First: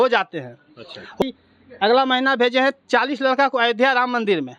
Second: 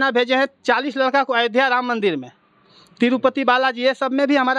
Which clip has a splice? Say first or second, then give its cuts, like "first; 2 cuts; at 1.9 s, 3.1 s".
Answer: first; 1 cut; at 1.2 s